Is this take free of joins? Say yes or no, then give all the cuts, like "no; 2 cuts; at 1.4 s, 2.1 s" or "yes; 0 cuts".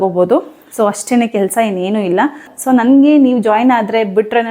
no; 1 cut; at 2.5 s